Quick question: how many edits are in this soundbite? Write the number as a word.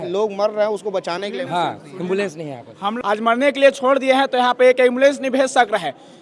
one